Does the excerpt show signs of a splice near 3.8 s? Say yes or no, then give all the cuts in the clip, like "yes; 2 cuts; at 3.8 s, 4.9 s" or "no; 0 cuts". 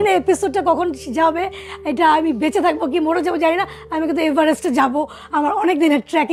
no; 0 cuts